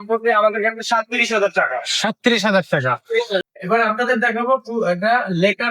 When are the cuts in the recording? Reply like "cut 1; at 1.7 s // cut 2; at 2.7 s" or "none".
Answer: cut 1; at 3.5 s